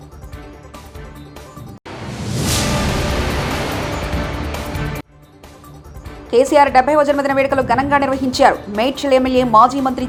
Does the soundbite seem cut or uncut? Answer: uncut